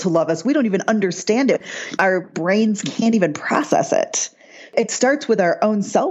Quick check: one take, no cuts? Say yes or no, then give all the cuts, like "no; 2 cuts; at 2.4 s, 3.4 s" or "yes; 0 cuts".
no; 2 cuts; at 1.8 s, 4.7 s